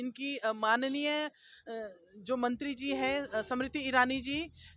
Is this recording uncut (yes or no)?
yes